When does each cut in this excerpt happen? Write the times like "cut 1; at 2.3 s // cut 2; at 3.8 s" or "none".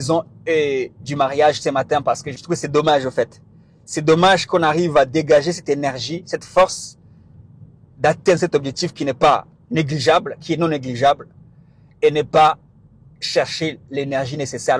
cut 1; at 2.4 s